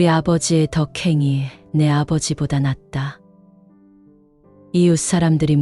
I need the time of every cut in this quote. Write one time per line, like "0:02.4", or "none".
none